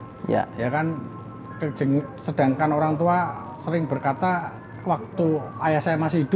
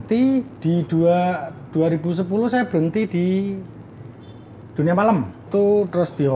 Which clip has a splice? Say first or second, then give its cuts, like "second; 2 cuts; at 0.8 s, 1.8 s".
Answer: second; 1 cut; at 5.5 s